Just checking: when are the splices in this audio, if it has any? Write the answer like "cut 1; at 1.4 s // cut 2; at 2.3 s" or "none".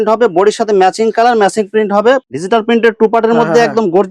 cut 1; at 2.2 s